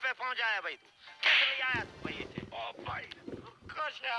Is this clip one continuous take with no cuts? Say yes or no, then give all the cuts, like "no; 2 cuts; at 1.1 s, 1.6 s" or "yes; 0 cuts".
no; 1 cut; at 2.5 s